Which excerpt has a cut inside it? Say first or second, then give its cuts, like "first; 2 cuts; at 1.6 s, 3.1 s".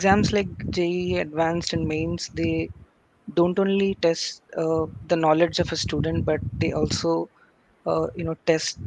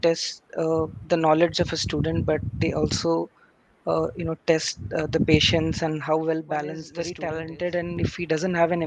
second; 1 cut; at 7.0 s